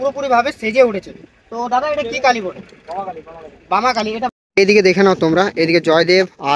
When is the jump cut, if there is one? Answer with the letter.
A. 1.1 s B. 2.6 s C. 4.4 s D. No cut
C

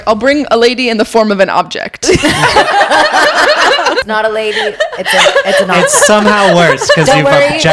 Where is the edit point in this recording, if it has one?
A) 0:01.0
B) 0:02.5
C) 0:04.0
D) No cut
C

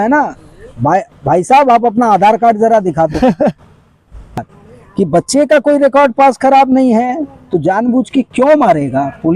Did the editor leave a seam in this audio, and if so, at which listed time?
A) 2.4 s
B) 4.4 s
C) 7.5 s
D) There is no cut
B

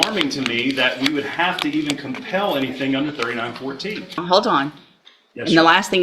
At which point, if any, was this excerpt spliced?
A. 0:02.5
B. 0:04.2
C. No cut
B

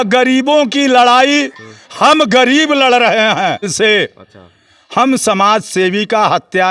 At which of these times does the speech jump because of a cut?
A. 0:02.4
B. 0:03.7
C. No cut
B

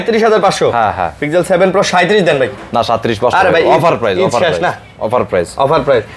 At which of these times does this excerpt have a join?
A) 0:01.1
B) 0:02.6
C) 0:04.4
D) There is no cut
D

